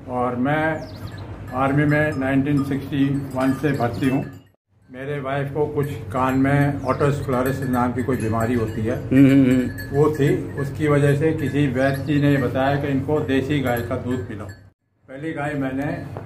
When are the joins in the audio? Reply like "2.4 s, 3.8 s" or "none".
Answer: 4.4 s, 14.7 s